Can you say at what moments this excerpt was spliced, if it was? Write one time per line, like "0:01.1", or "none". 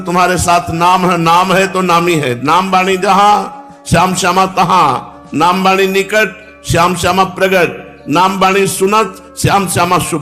none